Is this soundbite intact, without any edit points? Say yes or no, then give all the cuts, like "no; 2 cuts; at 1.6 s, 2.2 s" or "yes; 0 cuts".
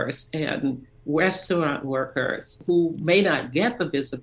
no; 1 cut; at 2.6 s